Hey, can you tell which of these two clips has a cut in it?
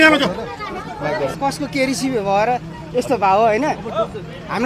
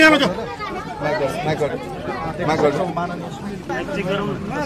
first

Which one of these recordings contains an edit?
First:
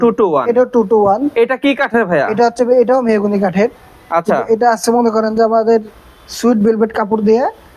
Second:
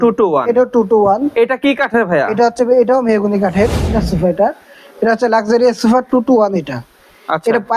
second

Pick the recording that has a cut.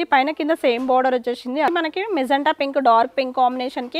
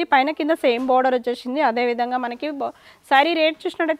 first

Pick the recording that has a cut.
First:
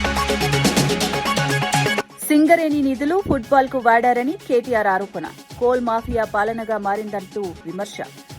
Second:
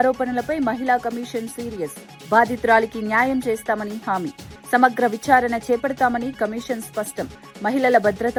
first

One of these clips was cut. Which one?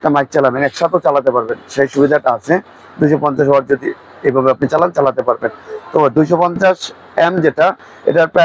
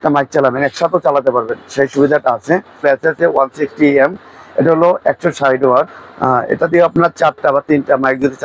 second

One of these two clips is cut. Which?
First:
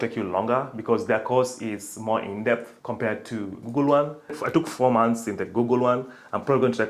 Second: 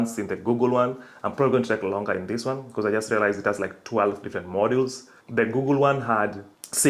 first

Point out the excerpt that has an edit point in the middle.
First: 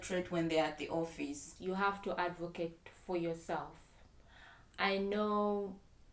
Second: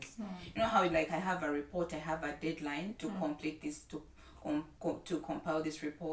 first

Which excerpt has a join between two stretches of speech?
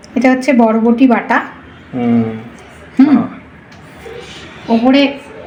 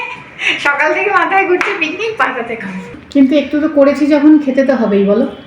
second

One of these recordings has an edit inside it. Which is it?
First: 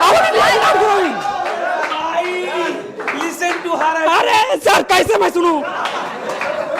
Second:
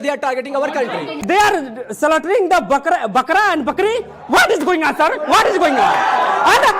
second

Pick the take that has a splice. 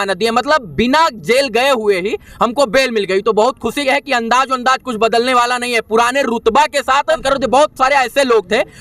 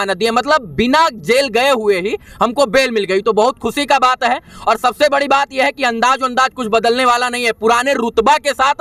first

